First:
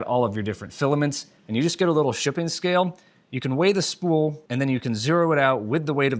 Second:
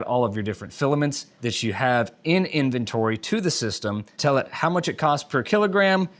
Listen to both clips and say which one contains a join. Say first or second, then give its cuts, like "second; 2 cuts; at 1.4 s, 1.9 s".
first; 1 cut; at 1.3 s